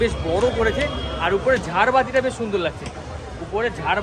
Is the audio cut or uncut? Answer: uncut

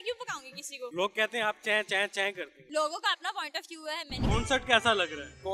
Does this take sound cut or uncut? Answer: cut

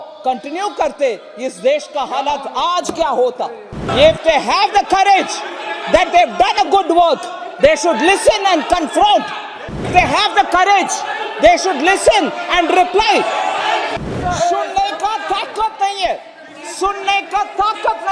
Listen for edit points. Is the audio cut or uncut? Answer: cut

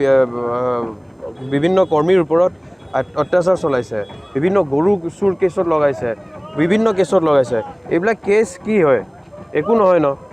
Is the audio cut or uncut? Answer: uncut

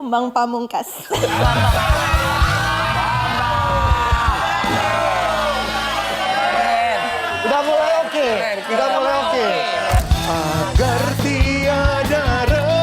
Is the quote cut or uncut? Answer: cut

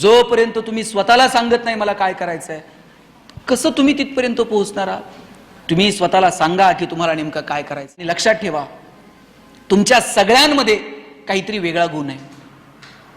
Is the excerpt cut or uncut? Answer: cut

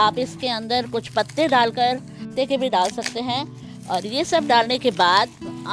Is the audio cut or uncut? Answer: cut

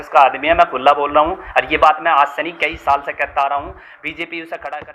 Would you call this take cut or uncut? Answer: uncut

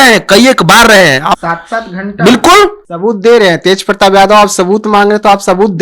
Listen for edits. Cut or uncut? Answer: cut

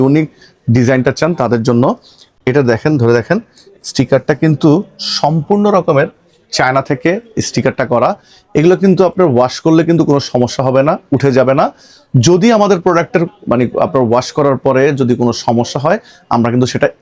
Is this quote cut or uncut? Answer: uncut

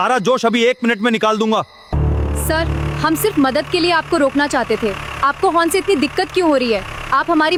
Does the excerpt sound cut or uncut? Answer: uncut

